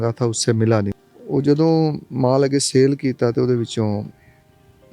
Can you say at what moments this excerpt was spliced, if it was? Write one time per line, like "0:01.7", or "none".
0:00.9